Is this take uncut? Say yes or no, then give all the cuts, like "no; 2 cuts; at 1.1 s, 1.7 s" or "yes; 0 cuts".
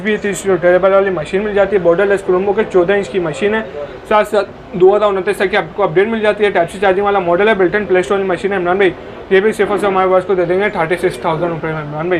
yes; 0 cuts